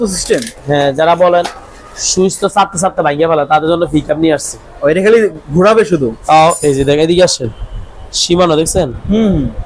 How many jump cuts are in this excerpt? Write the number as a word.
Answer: zero